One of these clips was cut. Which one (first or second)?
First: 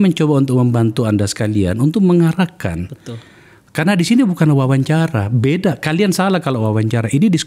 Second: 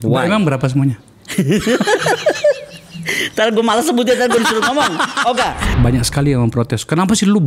second